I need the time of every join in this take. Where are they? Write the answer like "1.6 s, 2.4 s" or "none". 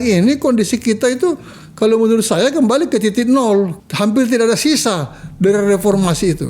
3.8 s